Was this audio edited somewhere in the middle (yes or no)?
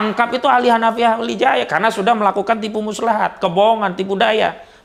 no